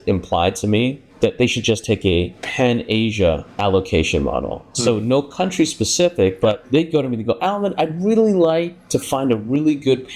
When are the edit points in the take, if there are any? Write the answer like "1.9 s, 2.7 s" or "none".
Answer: 1.0 s, 6.6 s, 8.8 s

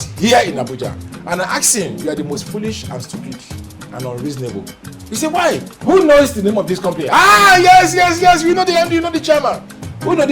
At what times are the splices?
1.1 s, 5.7 s

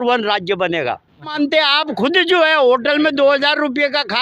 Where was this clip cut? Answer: 1.3 s

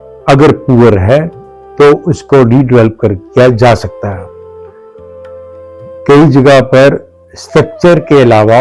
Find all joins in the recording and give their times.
none

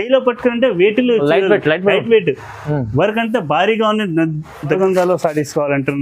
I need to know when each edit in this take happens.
4.8 s

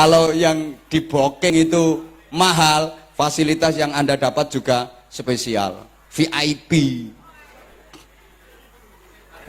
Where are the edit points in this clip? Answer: 1.5 s

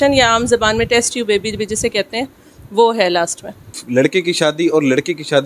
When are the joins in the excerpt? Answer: 3.8 s

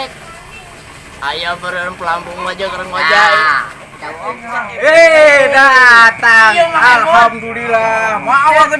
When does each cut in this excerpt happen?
4.3 s

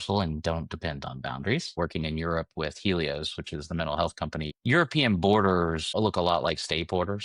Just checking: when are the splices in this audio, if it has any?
1.8 s, 4.5 s

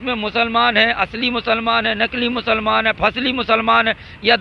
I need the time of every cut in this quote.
none

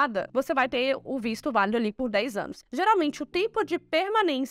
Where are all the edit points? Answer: 2.6 s

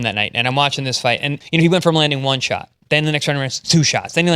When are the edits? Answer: 1.3 s

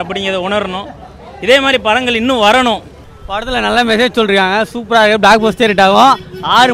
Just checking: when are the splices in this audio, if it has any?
3.0 s

